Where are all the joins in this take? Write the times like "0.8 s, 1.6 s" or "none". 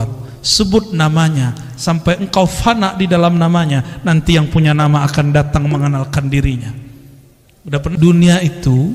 7.9 s